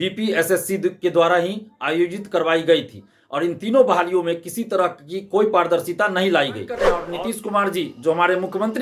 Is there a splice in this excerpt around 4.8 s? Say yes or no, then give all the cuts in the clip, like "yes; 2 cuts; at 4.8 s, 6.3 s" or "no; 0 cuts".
no; 1 cut; at 6.9 s